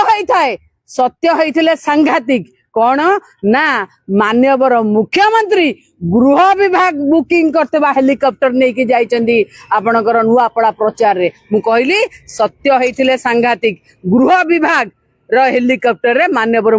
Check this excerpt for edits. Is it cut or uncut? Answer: uncut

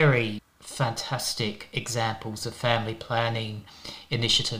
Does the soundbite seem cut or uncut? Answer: uncut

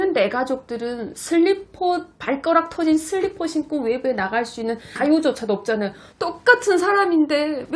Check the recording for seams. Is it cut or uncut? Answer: cut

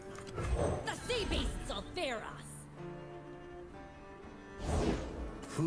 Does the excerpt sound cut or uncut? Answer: uncut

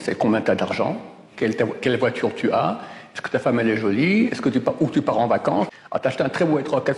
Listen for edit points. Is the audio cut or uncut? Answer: cut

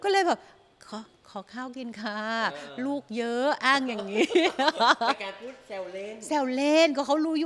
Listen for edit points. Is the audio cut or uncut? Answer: uncut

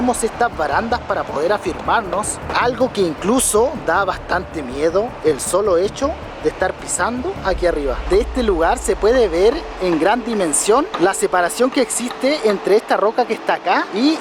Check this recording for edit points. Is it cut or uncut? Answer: uncut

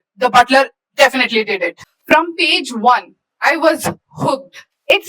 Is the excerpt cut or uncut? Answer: cut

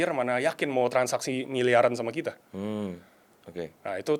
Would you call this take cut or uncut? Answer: uncut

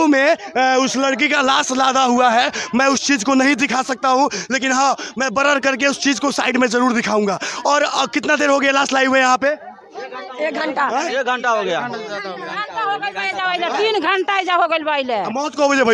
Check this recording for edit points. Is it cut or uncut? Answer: uncut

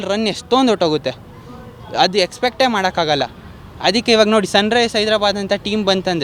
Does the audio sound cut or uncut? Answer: uncut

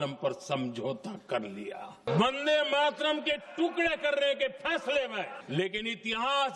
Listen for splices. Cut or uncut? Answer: cut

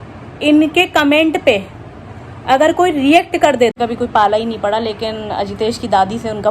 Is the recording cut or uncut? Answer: cut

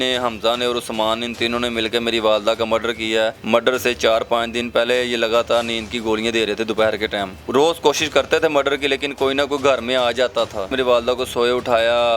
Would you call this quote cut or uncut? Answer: cut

